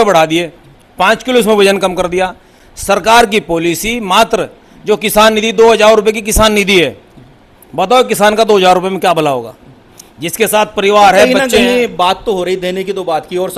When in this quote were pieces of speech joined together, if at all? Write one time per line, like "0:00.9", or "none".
none